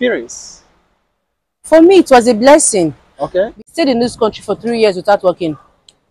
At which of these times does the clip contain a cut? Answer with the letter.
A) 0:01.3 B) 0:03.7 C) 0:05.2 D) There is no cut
B